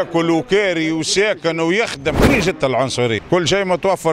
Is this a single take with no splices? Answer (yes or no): no